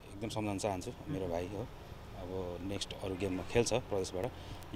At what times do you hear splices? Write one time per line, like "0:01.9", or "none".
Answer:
none

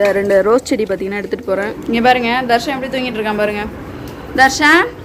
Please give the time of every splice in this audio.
0:01.8

